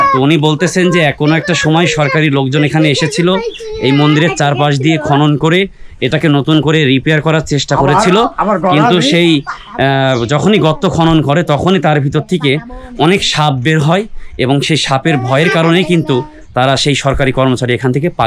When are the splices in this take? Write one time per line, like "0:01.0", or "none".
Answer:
none